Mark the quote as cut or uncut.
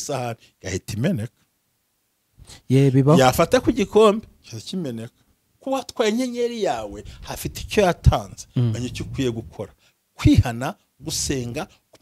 cut